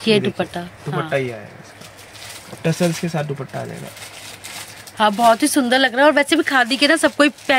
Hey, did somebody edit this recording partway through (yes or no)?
no